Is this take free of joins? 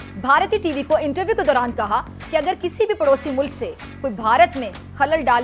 yes; 0 cuts

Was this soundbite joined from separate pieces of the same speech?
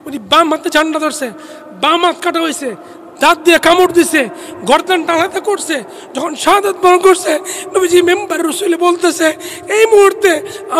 no; 0 cuts

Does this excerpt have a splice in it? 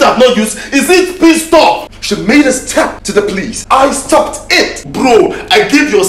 yes; 3 cuts; at 1.9 s, 3.3 s, 4.9 s

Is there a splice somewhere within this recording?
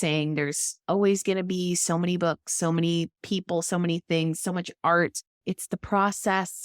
yes; 1 cut; at 5.4 s

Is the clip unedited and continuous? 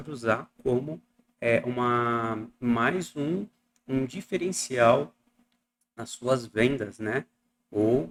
yes; 0 cuts

